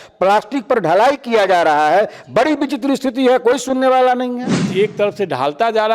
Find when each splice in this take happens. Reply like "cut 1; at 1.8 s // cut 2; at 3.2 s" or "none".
cut 1; at 4.7 s